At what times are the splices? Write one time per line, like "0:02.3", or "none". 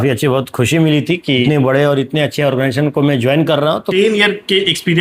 0:01.4
0:03.8